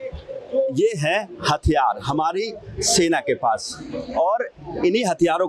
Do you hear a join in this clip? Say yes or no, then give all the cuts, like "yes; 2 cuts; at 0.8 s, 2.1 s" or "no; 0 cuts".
no; 0 cuts